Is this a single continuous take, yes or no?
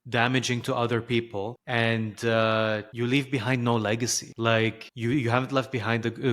no